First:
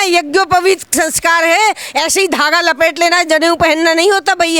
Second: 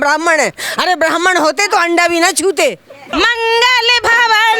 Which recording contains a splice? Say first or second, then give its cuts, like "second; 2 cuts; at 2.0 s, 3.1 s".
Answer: second; 1 cut; at 3.1 s